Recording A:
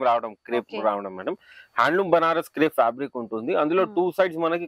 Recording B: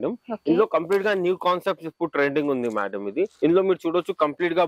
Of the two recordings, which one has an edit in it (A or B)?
B